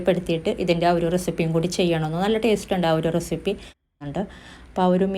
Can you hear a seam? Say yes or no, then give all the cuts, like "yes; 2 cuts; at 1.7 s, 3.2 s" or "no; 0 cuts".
yes; 1 cut; at 4.0 s